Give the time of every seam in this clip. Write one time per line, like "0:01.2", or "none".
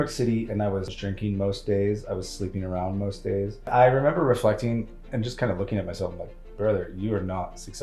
0:00.9
0:03.7